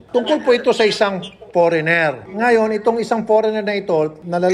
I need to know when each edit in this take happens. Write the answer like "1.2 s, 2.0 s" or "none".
none

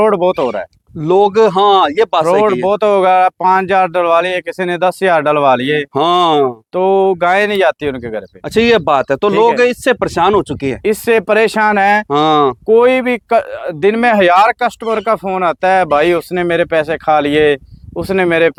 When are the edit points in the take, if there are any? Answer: none

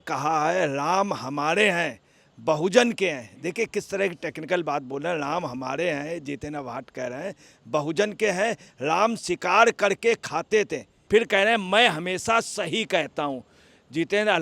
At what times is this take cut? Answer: 10.9 s

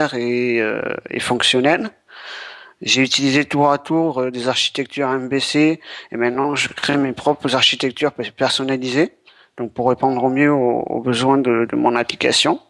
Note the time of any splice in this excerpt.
none

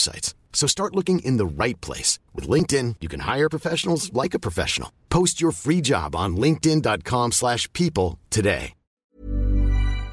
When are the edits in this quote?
9.0 s

